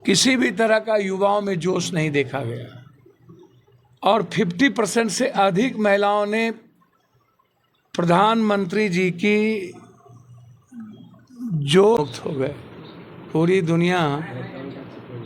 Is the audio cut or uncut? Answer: cut